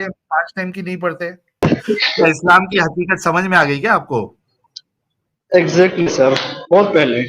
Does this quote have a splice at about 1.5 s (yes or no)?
yes